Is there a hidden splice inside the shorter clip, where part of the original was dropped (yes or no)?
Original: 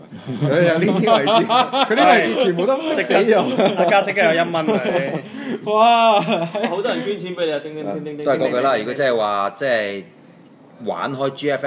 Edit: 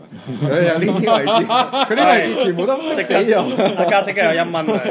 no